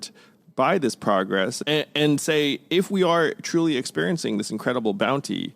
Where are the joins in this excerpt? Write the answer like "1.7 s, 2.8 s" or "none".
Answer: 1.6 s